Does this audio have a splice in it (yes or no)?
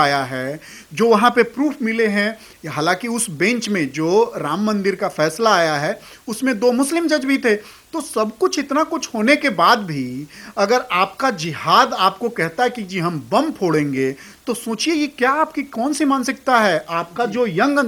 no